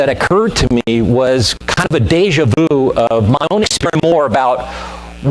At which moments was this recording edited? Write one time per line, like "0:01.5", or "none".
none